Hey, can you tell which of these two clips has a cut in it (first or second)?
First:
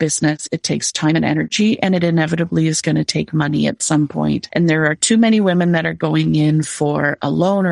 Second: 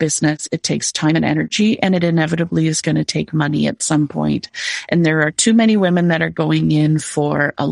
first